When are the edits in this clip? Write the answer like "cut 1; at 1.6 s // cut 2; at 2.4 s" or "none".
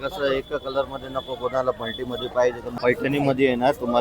cut 1; at 2.6 s